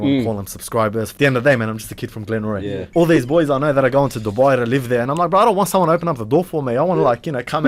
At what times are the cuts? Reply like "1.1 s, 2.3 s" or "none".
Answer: 1.1 s, 2.8 s